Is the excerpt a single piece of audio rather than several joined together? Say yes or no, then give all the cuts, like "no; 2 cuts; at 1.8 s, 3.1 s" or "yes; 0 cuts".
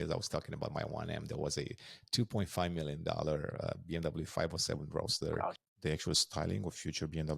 no; 1 cut; at 5.6 s